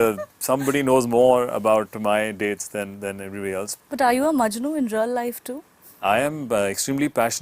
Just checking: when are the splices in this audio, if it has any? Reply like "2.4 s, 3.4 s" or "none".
3.7 s